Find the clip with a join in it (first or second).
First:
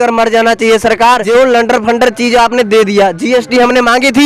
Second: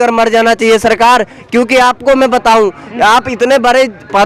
first